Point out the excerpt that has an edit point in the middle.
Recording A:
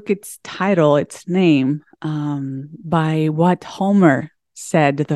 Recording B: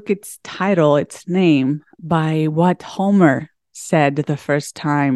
B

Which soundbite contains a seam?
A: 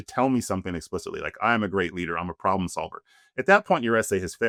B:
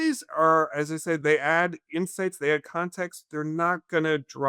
B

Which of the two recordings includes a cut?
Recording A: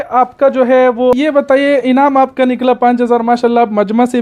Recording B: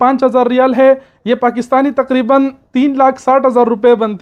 A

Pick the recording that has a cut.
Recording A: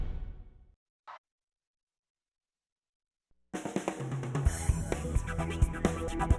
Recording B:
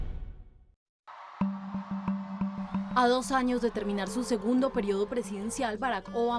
B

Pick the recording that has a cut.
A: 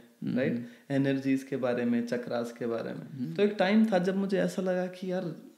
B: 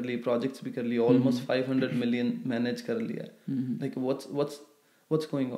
A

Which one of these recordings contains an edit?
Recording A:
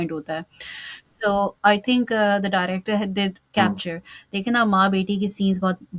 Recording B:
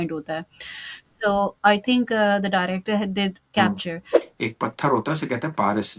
B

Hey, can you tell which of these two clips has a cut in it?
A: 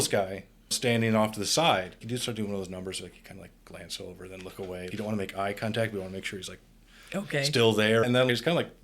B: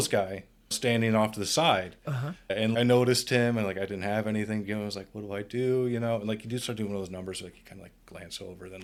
A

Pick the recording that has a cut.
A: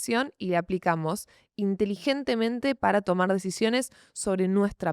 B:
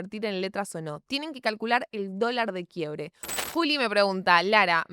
B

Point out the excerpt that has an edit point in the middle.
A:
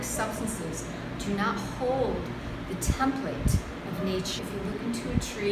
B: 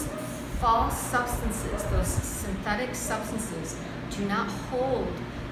A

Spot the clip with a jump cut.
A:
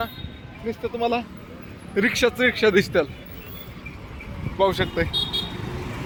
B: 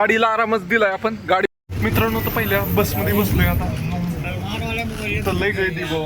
B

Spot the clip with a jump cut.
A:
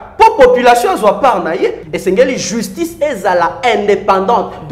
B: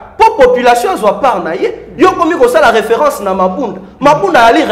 A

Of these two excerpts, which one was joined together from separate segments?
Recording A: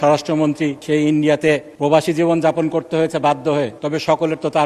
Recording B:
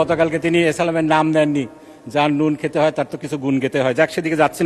A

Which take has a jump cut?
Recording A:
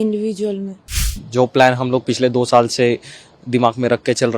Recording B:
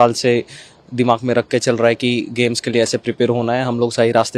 A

